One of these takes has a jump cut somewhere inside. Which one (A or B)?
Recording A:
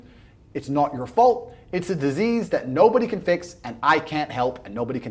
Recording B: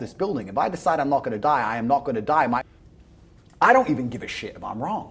B